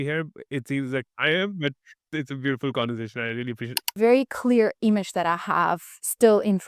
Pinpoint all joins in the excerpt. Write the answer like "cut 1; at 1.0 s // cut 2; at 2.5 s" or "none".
cut 1; at 2.1 s // cut 2; at 3.9 s